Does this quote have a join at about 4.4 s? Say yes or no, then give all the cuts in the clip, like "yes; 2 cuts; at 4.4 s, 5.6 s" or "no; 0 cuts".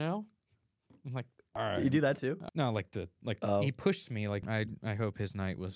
yes; 3 cuts; at 1.4 s, 2.4 s, 4.4 s